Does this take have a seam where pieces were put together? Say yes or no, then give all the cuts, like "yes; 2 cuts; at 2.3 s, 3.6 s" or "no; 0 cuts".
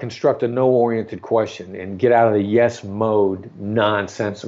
no; 0 cuts